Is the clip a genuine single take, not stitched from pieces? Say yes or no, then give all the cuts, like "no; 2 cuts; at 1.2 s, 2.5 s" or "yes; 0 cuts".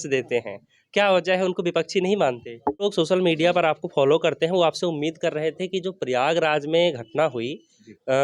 no; 1 cut; at 2.8 s